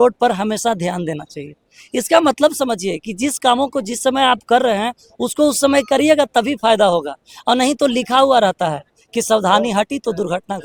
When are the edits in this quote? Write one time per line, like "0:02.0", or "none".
none